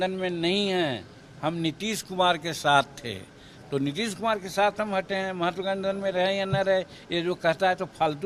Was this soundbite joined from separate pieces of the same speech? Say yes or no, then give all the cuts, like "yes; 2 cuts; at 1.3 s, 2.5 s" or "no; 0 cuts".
no; 0 cuts